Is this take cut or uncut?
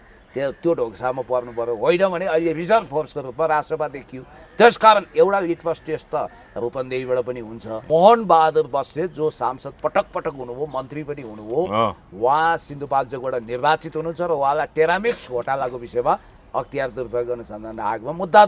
cut